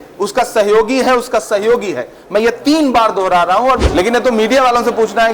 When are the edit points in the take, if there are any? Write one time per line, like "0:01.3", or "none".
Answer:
0:03.9